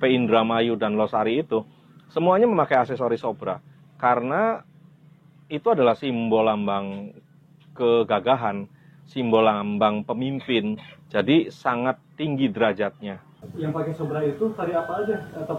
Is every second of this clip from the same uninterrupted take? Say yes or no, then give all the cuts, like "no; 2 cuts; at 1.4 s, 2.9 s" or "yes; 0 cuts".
yes; 0 cuts